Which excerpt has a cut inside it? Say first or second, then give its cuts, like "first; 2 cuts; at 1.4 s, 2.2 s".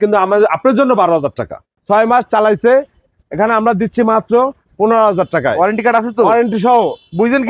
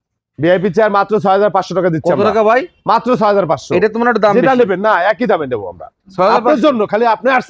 first; 1 cut; at 1.8 s